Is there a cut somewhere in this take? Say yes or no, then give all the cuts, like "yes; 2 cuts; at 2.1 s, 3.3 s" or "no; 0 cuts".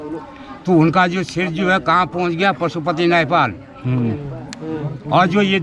no; 0 cuts